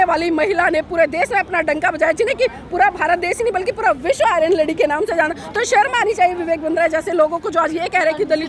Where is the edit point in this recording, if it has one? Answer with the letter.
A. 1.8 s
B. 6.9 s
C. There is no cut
C